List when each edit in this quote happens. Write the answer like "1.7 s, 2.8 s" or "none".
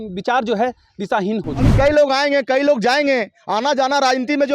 1.7 s